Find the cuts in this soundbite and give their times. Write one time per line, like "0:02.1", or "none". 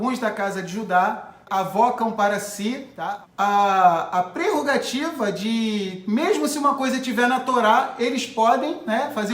0:01.4
0:02.9